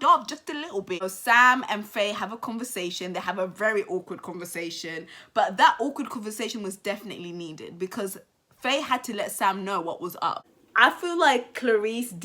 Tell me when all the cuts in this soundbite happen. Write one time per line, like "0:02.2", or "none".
0:01.0
0:10.5